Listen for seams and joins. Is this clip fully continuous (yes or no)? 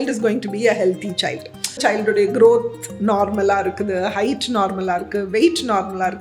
no